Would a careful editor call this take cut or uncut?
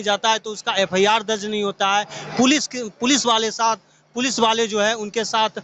uncut